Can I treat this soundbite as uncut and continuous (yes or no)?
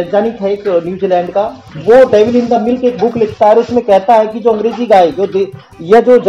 yes